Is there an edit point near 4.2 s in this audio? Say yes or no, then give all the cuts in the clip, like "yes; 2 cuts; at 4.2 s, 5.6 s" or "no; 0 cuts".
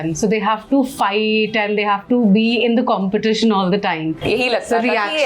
yes; 1 cut; at 4.2 s